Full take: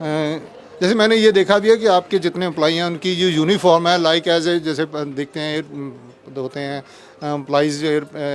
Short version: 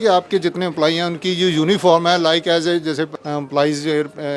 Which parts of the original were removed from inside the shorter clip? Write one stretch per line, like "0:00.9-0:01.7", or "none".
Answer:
0:04.9-0:07.1